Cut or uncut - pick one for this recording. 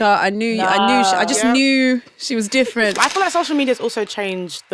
cut